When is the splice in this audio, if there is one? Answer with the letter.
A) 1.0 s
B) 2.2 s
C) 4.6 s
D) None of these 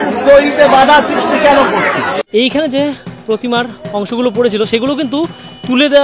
B